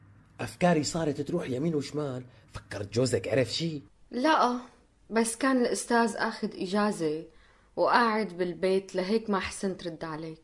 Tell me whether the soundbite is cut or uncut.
uncut